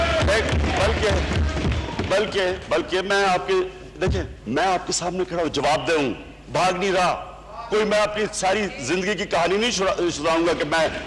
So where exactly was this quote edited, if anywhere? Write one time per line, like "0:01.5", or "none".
none